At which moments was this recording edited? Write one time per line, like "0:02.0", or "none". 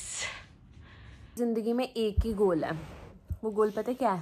0:01.4